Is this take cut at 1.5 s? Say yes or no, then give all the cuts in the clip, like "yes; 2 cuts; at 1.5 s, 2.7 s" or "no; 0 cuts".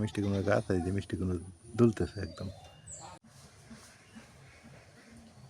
no; 1 cut; at 3.2 s